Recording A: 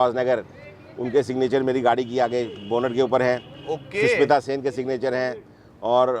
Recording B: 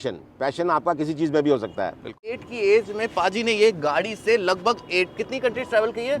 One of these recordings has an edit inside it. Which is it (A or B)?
B